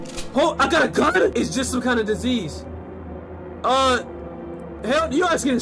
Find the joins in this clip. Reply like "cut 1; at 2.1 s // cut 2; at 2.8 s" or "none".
none